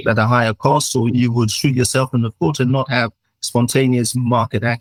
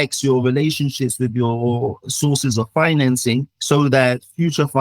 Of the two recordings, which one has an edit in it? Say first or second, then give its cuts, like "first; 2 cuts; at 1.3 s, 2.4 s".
second; 1 cut; at 3.5 s